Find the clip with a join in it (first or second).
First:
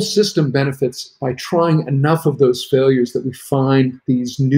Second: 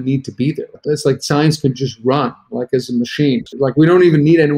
second